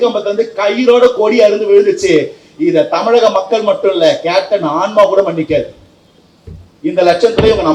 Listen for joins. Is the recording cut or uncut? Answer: uncut